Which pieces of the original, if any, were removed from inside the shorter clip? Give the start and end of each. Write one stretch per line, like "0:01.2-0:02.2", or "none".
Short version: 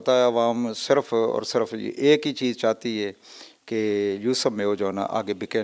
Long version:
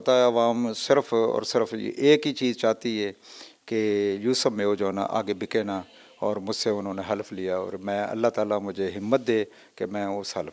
none